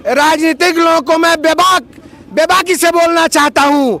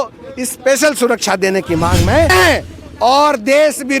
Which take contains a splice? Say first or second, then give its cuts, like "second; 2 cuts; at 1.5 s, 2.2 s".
second; 1 cut; at 2.3 s